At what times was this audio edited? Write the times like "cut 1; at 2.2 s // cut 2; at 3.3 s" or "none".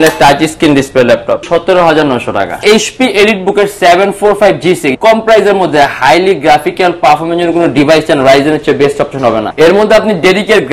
cut 1; at 1.4 s // cut 2; at 2.6 s // cut 3; at 4.9 s // cut 4; at 9.5 s

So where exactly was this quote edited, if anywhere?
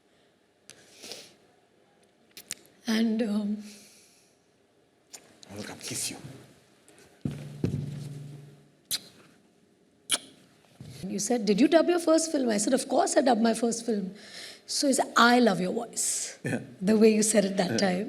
cut 1; at 11.1 s

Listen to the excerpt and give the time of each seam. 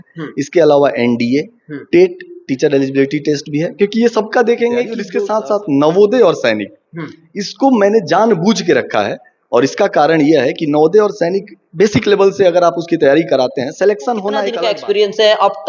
cut 1; at 5.0 s // cut 2; at 14.5 s

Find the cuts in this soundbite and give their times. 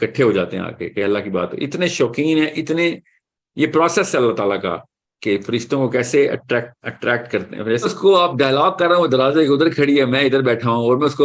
cut 1; at 7.8 s

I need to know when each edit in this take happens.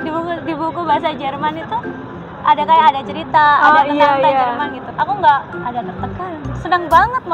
cut 1; at 4.8 s

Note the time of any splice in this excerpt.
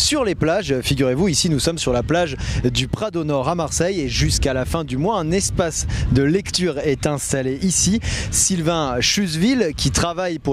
cut 1; at 9.1 s

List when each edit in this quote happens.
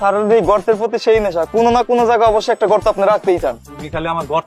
none

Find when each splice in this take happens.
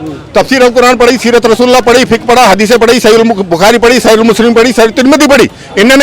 none

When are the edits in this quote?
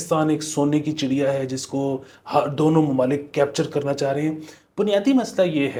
none

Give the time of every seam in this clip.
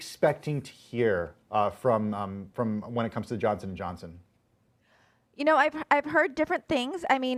none

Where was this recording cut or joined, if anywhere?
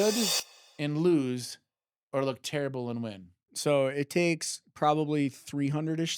cut 1; at 3.4 s

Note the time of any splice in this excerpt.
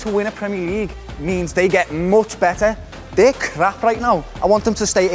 none

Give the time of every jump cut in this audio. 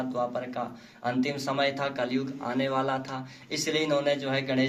none

